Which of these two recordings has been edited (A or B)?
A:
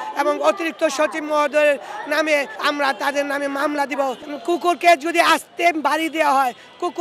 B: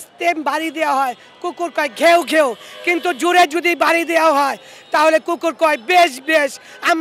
A